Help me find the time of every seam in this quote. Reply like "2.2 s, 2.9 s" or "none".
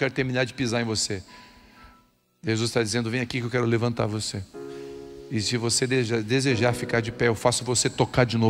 none